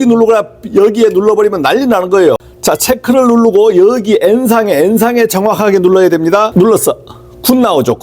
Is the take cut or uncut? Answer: cut